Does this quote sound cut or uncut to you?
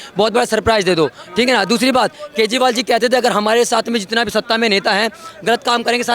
uncut